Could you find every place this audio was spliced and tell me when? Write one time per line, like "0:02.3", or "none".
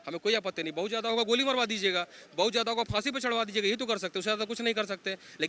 none